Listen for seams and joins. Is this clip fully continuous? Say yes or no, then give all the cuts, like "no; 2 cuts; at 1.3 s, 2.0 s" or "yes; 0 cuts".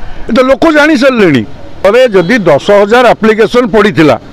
no; 1 cut; at 1.8 s